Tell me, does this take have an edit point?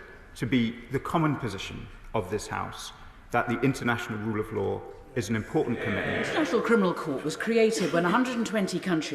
yes; 1 cut; at 6.3 s

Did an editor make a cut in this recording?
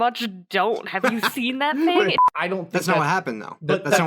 yes; 1 cut; at 2.2 s

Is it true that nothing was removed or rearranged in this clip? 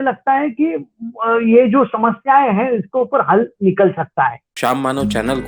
no; 1 cut; at 4.5 s

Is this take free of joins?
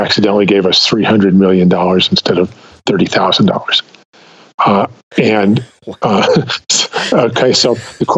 yes; 0 cuts

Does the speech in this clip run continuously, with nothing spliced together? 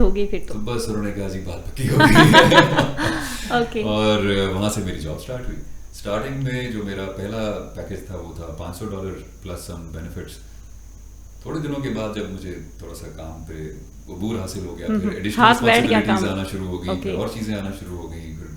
yes; 0 cuts

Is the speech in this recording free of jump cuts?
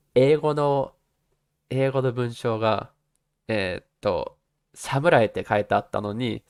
yes; 0 cuts

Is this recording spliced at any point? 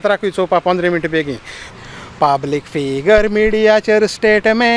yes; 1 cut; at 1.7 s

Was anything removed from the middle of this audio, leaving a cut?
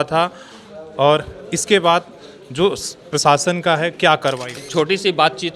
yes; 1 cut; at 4.6 s

